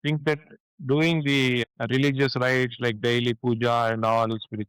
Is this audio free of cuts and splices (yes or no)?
no